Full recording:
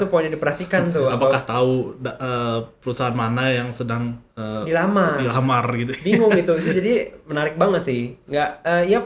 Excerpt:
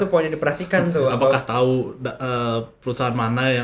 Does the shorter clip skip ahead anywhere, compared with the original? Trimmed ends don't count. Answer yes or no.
no